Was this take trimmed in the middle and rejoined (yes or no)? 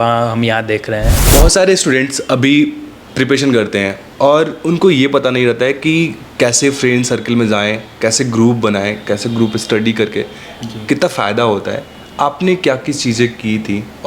yes